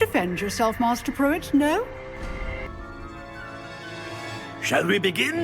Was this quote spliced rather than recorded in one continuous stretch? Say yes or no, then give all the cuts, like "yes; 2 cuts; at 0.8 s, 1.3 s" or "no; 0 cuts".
yes; 1 cut; at 2.6 s